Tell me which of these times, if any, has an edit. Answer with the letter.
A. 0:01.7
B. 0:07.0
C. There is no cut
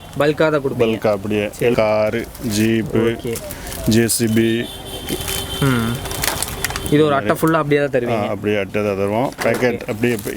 A